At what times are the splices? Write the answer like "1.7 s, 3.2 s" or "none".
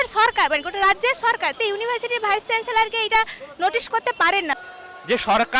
1.6 s, 4.6 s